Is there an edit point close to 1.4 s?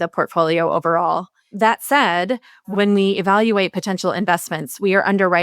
yes; 2 cuts; at 1.4 s, 2.6 s

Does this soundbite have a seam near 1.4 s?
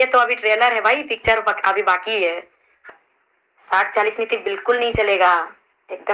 no; 1 cut; at 2.9 s

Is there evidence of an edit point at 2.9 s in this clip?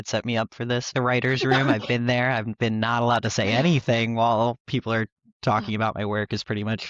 no; 1 cut; at 0.9 s

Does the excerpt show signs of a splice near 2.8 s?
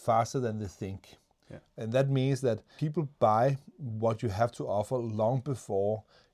yes; 1 cut; at 2.8 s

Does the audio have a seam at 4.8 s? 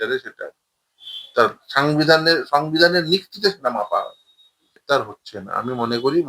yes; 1 cut; at 4.8 s

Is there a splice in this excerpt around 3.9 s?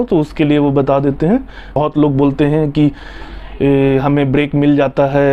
no; 1 cut; at 1.8 s

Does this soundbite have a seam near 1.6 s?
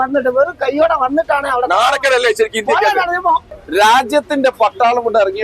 no; 1 cut; at 3.5 s

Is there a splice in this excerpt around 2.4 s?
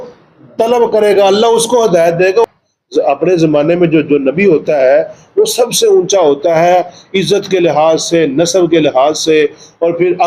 yes; 1 cut; at 2.4 s

